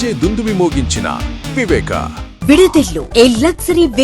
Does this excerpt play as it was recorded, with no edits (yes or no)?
no